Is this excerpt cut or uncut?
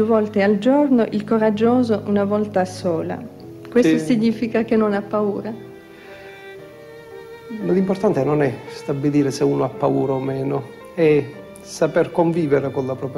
uncut